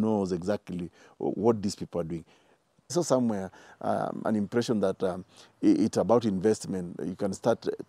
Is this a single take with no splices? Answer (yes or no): no